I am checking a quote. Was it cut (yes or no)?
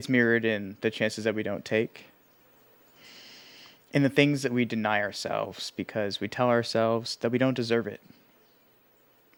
no